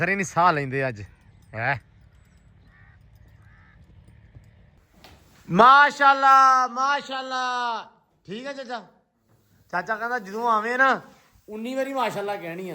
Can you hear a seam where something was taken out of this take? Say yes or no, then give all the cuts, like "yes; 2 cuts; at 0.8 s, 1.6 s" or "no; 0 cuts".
yes; 1 cut; at 4.7 s